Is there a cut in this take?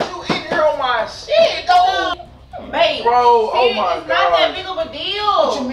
yes; 1 cut; at 2.1 s

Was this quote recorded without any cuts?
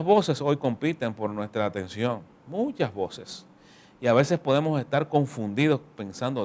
yes; 0 cuts

